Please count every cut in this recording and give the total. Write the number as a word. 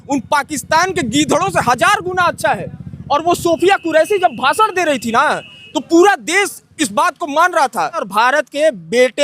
one